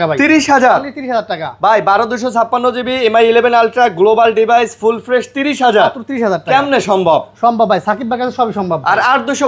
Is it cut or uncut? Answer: uncut